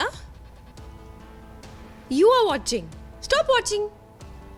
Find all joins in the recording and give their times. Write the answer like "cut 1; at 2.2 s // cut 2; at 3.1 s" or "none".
none